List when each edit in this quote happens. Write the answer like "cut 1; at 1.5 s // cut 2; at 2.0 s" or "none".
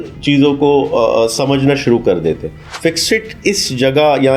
none